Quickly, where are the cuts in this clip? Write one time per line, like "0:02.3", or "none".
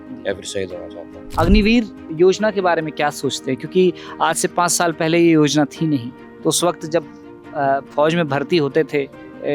0:01.2